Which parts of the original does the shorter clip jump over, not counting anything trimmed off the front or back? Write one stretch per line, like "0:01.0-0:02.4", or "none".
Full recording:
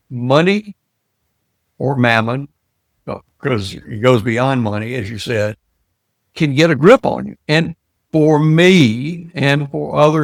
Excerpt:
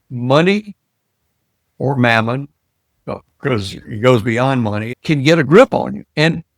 0:04.9-0:06.2